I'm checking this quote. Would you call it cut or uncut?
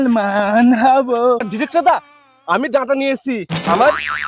cut